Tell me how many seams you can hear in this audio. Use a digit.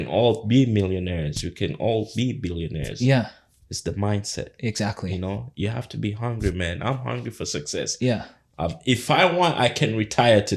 0